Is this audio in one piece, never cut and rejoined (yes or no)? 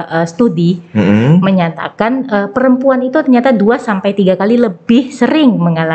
yes